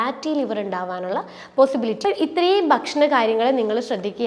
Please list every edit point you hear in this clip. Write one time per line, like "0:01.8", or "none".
0:02.0